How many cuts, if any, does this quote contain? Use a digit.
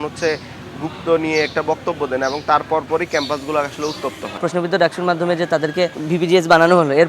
2